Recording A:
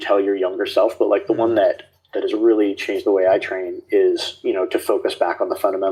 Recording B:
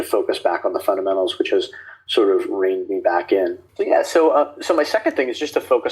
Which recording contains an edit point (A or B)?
B